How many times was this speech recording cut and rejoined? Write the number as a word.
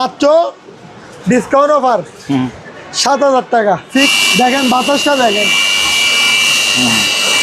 one